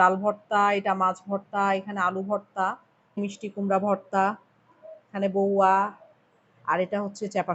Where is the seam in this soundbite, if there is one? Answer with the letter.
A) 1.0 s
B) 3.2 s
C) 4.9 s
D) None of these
B